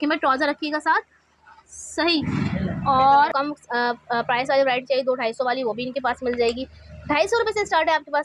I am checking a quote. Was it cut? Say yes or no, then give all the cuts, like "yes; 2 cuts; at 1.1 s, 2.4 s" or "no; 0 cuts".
yes; 1 cut; at 3.3 s